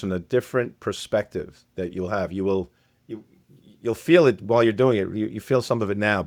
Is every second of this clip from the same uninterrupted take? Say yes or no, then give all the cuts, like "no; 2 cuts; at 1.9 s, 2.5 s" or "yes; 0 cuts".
yes; 0 cuts